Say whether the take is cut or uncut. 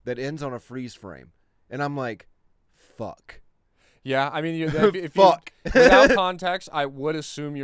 uncut